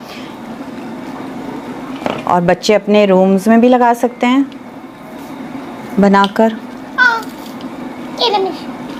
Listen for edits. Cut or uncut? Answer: uncut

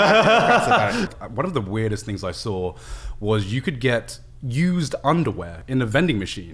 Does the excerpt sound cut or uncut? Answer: cut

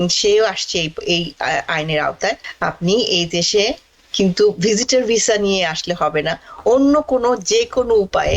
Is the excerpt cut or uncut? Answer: cut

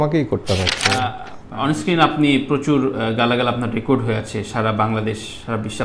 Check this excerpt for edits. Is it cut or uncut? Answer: cut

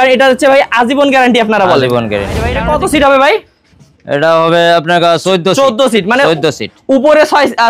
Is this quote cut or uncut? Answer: cut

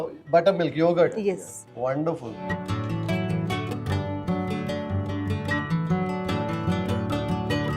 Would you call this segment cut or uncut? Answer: uncut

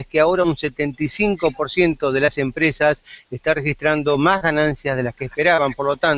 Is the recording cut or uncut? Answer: cut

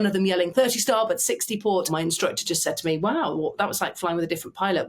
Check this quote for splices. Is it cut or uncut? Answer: cut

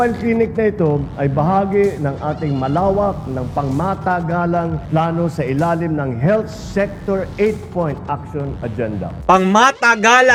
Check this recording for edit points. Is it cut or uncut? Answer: uncut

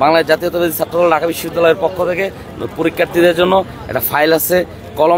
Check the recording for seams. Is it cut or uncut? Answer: uncut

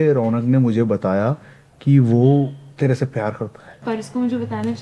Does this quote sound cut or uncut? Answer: cut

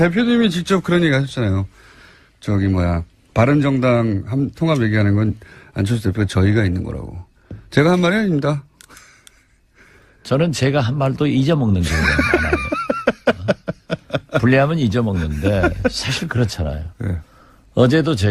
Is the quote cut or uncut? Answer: uncut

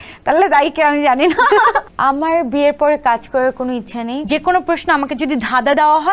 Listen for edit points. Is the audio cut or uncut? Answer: cut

